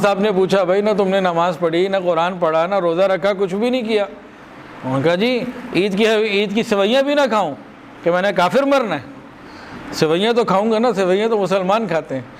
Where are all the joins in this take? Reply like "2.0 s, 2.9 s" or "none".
none